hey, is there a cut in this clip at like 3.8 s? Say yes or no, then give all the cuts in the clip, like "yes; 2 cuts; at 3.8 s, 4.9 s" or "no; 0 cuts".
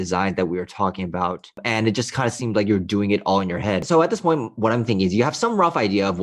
yes; 2 cuts; at 1.6 s, 3.8 s